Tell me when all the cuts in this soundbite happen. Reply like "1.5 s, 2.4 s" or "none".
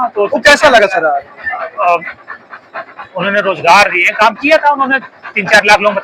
none

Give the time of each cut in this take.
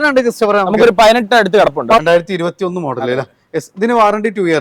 2.0 s

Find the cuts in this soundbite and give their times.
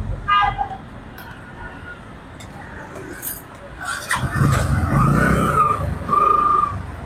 none

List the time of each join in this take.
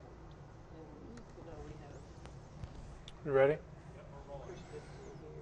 none

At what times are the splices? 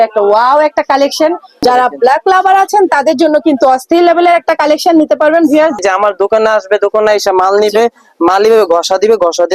1.6 s, 5.8 s

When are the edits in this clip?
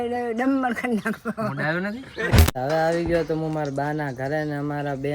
2.5 s

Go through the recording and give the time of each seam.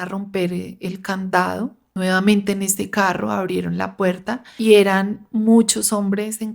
1.8 s, 4.5 s

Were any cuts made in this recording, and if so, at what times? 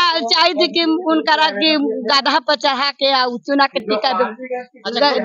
none

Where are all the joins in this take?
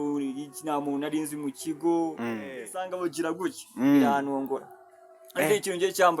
2.9 s

